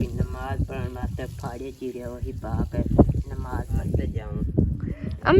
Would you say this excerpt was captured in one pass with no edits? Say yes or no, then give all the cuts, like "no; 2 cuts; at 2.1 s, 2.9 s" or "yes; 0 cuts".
no; 1 cut; at 4.1 s